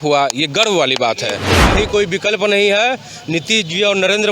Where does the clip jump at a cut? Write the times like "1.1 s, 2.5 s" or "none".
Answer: 1.5 s